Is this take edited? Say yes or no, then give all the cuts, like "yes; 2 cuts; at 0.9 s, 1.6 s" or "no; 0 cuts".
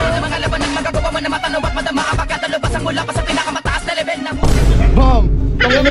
no; 0 cuts